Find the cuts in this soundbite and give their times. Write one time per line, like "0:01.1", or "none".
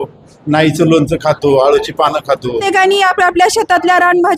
0:02.6